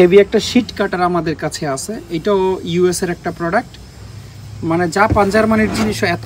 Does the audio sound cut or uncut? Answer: uncut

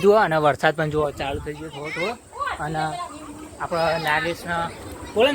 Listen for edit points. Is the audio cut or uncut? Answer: uncut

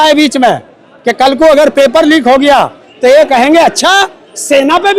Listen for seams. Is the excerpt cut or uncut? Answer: uncut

